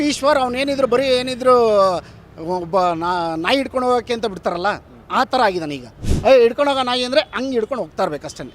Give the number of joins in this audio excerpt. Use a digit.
1